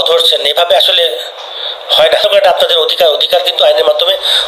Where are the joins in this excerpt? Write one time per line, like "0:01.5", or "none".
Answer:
0:02.2